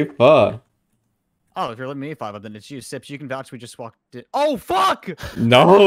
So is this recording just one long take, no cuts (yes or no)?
yes